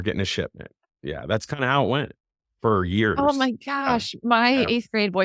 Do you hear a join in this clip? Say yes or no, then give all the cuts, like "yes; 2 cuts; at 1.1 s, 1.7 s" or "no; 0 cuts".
no; 0 cuts